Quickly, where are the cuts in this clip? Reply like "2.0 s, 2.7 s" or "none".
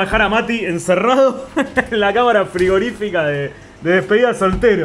none